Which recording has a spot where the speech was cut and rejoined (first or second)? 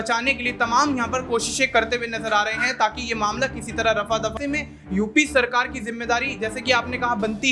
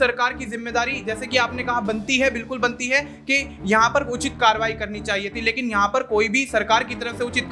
first